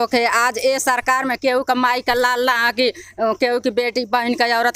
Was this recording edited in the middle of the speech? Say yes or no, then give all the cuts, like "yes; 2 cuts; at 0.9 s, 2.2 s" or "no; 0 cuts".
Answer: no; 0 cuts